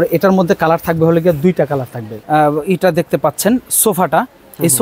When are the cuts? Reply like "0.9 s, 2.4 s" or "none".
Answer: 2.1 s